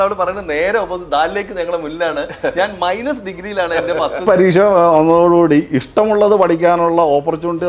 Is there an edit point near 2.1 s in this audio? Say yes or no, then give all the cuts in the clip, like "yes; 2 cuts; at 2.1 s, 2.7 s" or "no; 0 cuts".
no; 1 cut; at 4.2 s